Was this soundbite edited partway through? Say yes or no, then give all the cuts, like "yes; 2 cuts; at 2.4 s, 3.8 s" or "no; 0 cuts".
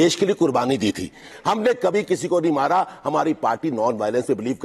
no; 0 cuts